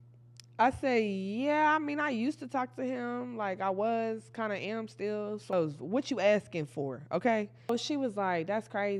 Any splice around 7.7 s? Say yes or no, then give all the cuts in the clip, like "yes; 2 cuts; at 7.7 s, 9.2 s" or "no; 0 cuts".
yes; 2 cuts; at 5.5 s, 7.7 s